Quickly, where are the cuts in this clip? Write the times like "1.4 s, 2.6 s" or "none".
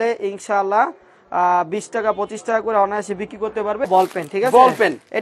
3.9 s